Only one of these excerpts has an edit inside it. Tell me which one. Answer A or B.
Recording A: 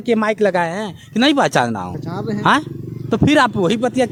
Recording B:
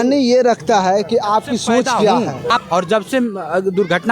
B